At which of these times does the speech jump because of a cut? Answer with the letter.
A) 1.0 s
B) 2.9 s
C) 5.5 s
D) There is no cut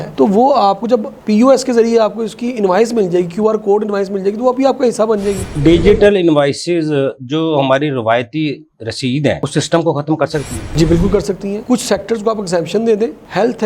C